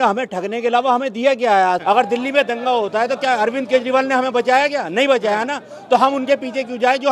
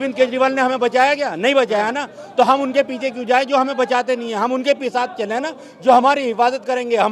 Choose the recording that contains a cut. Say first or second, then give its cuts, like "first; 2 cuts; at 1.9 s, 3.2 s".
first; 1 cut; at 1.8 s